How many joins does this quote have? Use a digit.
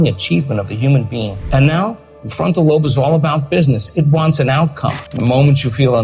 2